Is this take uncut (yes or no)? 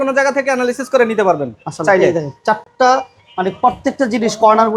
yes